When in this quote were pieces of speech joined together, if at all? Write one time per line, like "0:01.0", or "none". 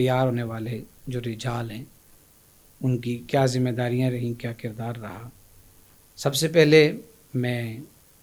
none